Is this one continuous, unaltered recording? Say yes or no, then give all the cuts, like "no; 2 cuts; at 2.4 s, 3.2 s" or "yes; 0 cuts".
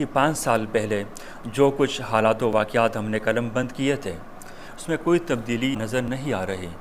no; 1 cut; at 5.8 s